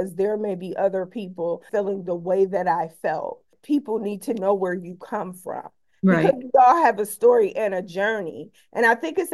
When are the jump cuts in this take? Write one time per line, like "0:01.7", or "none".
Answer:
0:01.6
0:03.6